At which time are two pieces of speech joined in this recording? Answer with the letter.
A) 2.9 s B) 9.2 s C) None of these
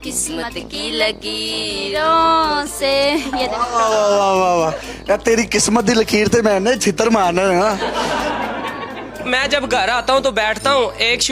B